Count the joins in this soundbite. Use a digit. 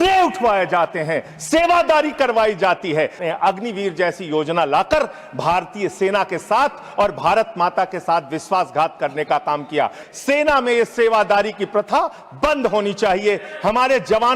2